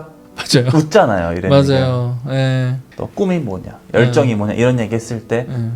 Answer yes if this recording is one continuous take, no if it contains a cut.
yes